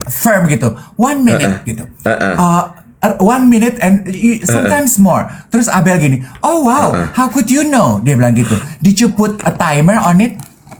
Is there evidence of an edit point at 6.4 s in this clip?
no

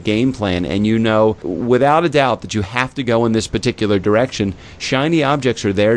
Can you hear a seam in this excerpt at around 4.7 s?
no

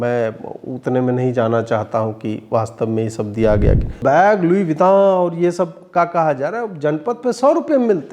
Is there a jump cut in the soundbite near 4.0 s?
yes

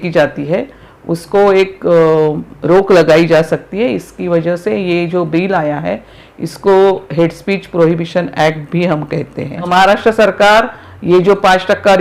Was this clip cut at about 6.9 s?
no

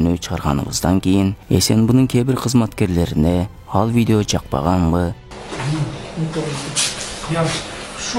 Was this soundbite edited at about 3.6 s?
no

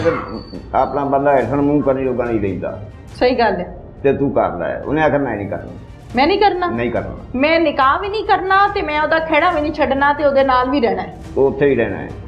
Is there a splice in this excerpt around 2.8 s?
no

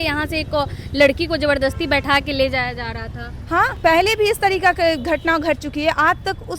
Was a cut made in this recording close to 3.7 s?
yes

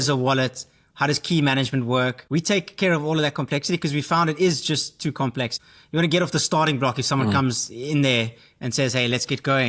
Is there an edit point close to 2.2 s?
yes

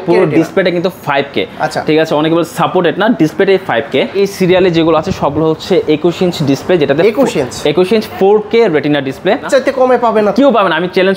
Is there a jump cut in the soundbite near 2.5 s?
no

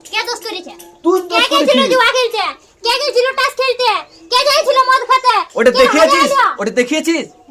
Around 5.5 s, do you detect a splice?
no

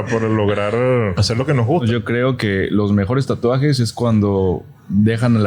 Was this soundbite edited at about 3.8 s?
no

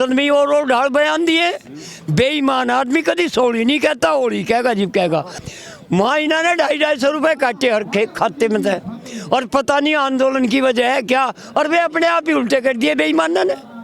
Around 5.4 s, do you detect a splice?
yes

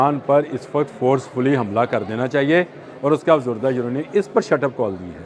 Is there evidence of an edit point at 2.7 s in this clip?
no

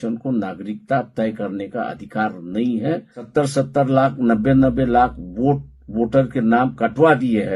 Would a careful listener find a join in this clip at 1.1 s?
no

